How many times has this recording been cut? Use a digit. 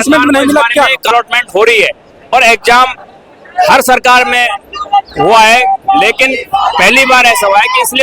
1